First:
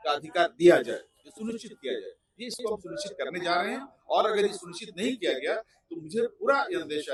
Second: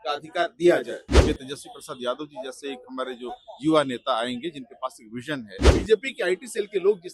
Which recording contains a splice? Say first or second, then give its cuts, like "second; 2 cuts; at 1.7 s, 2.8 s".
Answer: second; 2 cuts; at 1.1 s, 5.6 s